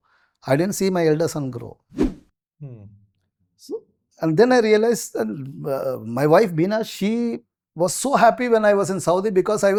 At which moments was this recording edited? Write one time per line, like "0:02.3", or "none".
none